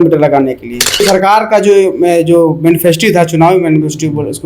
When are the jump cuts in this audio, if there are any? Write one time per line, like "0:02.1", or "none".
0:01.0